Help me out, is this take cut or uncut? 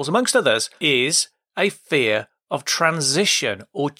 uncut